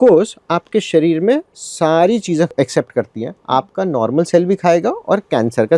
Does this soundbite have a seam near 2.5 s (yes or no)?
yes